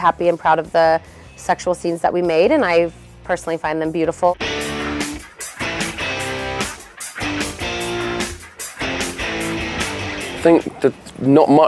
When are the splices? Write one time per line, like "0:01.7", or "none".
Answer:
none